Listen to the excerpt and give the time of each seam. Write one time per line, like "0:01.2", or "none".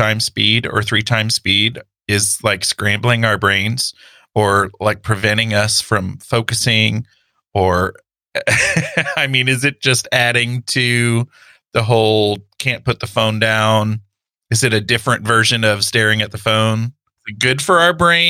0:17.3